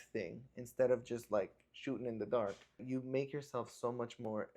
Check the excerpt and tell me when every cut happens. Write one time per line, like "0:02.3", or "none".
0:02.8